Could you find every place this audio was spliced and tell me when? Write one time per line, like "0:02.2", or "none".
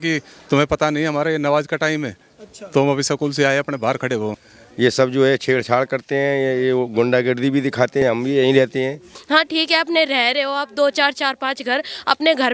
0:04.4
0:08.0
0:09.0